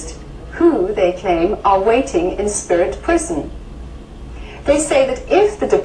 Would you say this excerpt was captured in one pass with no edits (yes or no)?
no